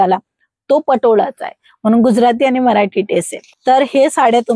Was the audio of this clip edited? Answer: yes; 1 cut; at 3.4 s

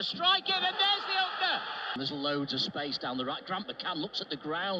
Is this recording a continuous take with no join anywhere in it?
no; 1 cut; at 2.0 s

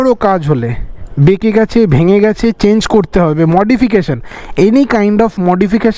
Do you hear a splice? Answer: no; 0 cuts

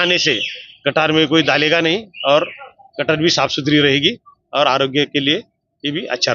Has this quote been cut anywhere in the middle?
no; 0 cuts

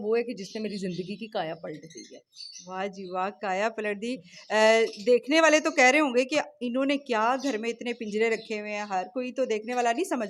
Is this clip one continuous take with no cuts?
yes; 0 cuts

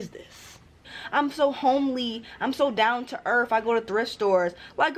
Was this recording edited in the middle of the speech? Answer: yes; 1 cut; at 0.9 s

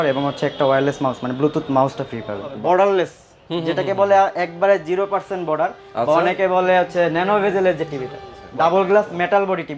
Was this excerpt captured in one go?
no; 2 cuts; at 2.5 s, 8.4 s

